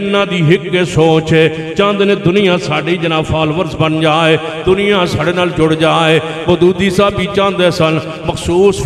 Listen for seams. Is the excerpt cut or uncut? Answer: uncut